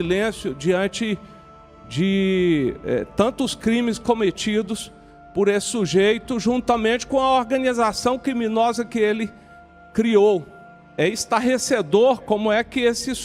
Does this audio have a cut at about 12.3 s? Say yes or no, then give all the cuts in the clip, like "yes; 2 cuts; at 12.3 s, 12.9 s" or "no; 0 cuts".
no; 1 cut; at 10.9 s